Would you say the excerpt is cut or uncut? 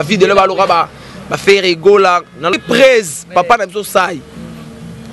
cut